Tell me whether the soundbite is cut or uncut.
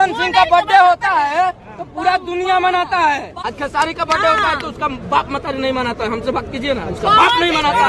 cut